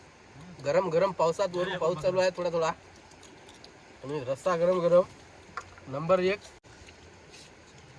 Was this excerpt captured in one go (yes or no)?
no